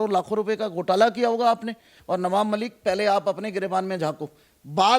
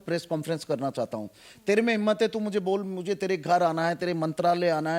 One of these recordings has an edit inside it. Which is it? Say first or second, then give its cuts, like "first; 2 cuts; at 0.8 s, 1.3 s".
first; 1 cut; at 1.9 s